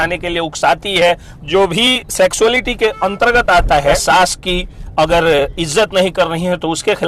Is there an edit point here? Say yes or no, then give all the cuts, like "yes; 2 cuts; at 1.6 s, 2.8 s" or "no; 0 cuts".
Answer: yes; 2 cuts; at 1.3 s, 4.0 s